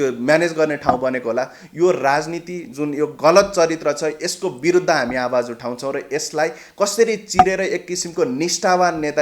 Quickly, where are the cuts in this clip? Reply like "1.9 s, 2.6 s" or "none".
none